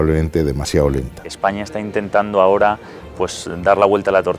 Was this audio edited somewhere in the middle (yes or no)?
yes